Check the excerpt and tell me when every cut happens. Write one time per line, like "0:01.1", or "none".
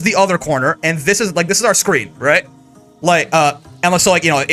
none